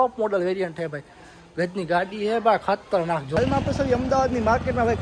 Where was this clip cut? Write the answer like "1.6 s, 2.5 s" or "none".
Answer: 3.3 s

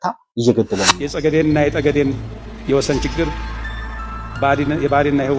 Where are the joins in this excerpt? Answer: 1.0 s

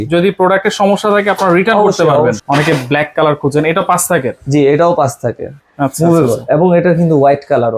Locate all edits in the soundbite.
2.4 s, 5.5 s

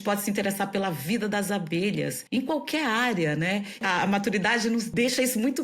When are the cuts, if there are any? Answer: 2.2 s, 3.8 s, 4.9 s

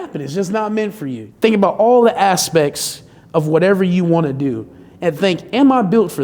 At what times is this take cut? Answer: 1.2 s

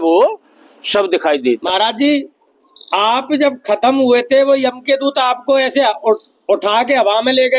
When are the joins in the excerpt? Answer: 1.6 s

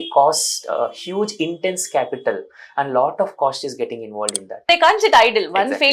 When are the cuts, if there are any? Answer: 4.6 s

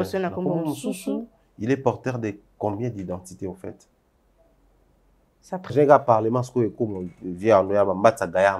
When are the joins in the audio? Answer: 5.7 s

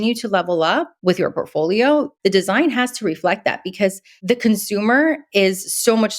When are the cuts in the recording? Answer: 0.9 s, 2.1 s, 4.1 s

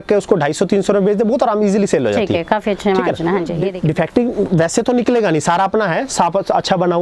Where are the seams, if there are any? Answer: 3.6 s

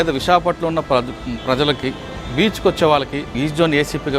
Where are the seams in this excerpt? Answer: 3.2 s

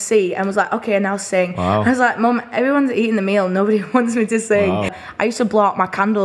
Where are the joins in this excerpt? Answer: 5.0 s

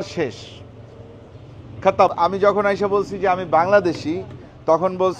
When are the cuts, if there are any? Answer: 2.1 s

